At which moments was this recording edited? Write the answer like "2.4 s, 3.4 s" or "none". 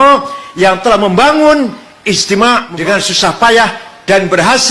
2.7 s